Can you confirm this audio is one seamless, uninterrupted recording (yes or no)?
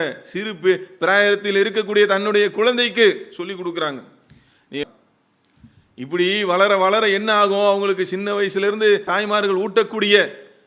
no